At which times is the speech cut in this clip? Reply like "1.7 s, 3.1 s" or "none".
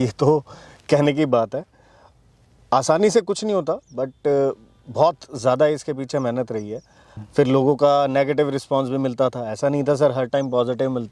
7.2 s